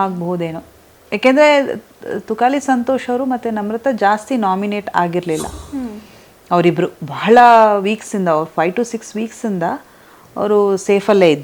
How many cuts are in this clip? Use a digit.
0